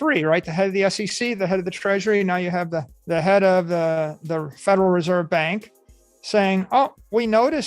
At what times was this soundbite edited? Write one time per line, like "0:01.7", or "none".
0:02.9